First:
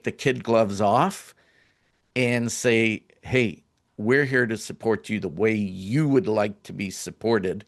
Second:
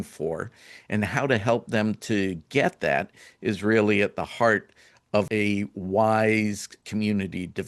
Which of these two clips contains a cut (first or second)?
second